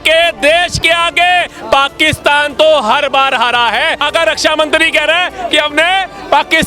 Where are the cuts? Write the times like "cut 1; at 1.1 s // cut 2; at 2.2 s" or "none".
cut 1; at 4.0 s